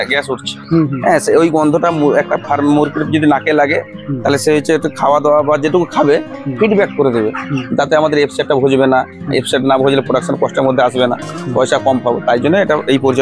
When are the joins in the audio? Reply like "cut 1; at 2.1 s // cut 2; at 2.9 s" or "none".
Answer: none